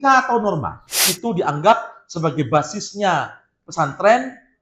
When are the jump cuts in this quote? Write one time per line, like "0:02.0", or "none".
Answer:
0:01.1